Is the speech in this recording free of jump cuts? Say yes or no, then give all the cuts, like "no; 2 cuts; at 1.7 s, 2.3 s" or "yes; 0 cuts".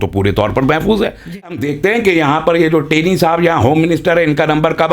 no; 1 cut; at 1.7 s